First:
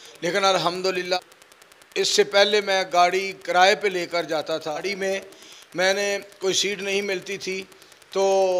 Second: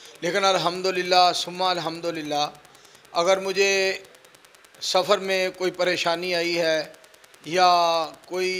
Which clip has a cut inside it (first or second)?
first